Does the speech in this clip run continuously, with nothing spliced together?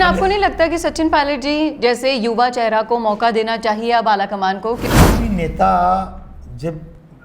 no; 1 cut; at 4.8 s

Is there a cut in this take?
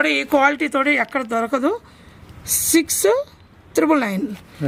no; 0 cuts

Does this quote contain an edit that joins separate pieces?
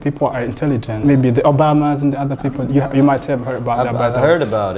yes; 1 cut; at 0.9 s

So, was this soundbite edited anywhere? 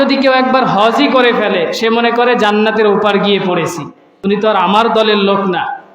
yes; 1 cut; at 4.1 s

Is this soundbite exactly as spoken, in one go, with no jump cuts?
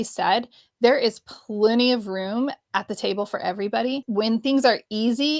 no; 1 cut; at 4.1 s

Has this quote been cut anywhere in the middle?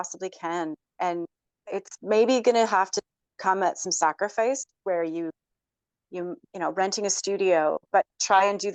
no; 0 cuts

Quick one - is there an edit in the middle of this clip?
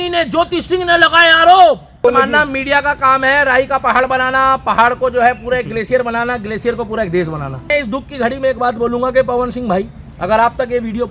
yes; 2 cuts; at 2.0 s, 7.7 s

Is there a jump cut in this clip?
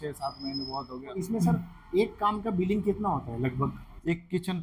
yes; 1 cut; at 1.2 s

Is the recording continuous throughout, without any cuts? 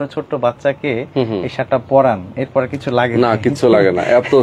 yes; 0 cuts

